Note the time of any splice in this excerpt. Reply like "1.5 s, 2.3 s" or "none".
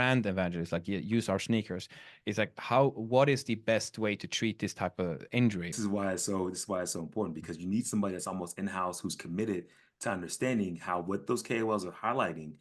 5.7 s